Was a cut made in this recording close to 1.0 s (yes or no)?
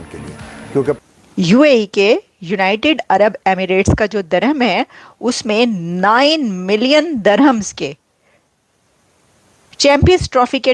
yes